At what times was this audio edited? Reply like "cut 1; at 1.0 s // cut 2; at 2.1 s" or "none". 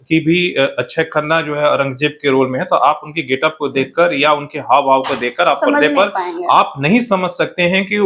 none